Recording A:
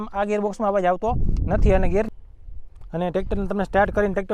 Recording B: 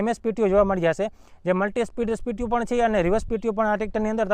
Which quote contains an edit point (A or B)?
A